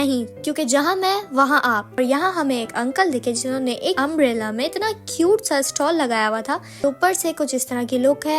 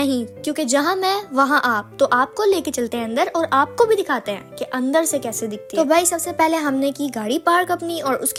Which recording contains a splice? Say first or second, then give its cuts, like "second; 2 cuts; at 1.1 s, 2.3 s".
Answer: first; 2 cuts; at 2.0 s, 6.8 s